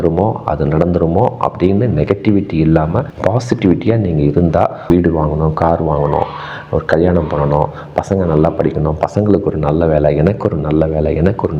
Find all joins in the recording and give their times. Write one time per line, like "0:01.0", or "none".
0:04.9